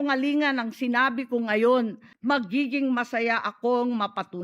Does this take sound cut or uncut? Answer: cut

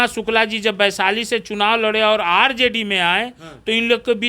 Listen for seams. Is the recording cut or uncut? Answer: uncut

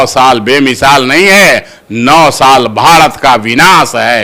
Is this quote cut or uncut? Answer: uncut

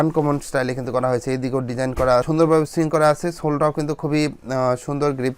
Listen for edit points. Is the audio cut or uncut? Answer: uncut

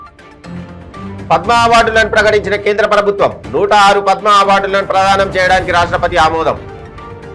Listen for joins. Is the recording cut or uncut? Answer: cut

